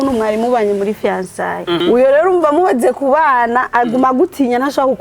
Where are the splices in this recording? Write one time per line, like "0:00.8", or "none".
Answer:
0:01.8